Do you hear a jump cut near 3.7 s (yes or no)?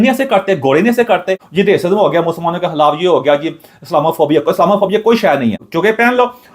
no